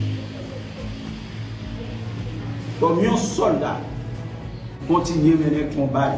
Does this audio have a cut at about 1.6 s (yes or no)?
no